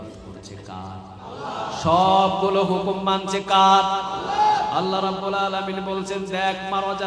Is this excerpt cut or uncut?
uncut